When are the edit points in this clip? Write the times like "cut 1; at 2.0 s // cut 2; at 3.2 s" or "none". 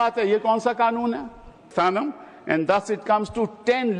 cut 1; at 1.7 s